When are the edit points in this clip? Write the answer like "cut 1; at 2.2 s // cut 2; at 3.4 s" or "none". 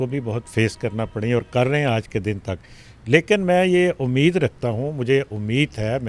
none